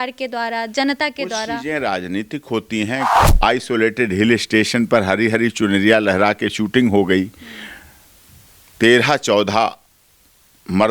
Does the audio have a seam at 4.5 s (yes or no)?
no